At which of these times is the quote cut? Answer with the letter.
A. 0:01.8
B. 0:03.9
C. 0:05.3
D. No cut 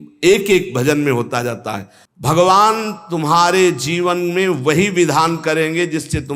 A